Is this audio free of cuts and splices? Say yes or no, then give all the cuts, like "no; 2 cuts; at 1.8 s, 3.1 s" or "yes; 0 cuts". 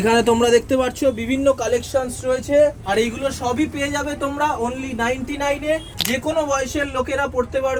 yes; 0 cuts